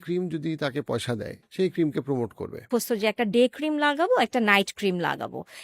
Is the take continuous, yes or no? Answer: no